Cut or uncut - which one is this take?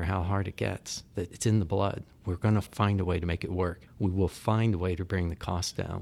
cut